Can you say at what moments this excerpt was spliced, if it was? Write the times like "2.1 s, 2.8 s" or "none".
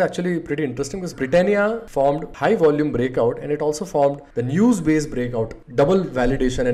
1.0 s, 5.6 s